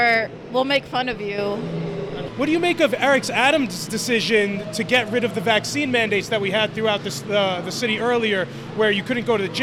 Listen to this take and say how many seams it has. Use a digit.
0